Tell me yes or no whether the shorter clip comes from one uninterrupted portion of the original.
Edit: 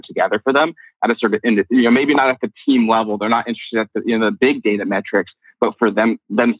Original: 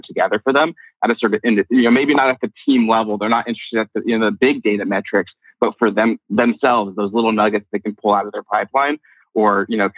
yes